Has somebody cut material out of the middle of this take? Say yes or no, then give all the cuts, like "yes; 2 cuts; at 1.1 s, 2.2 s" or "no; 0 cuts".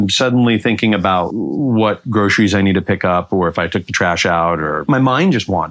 yes; 2 cuts; at 1.3 s, 4.8 s